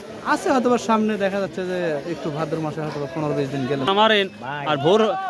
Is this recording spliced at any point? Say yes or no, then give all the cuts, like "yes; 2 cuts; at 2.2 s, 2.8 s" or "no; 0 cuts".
yes; 1 cut; at 3.9 s